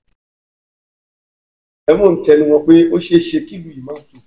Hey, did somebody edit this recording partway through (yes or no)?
no